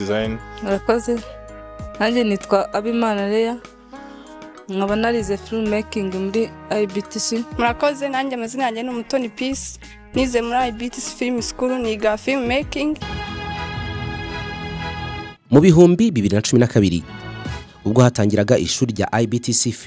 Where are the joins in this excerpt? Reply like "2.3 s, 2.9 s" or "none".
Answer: 13.0 s